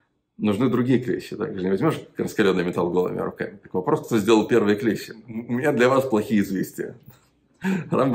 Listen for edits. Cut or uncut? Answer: cut